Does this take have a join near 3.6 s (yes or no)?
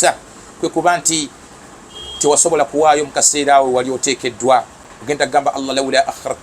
no